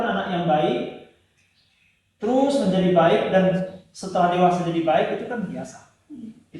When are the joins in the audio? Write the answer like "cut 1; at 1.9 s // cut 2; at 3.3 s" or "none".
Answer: none